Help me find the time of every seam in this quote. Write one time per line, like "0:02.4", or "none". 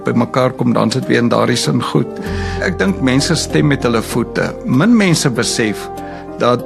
none